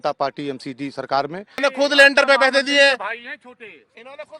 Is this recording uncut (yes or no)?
no